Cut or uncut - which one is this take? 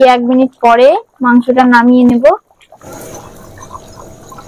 cut